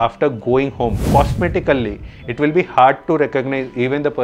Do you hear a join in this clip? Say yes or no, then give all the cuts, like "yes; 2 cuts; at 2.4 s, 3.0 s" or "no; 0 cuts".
yes; 1 cut; at 1.0 s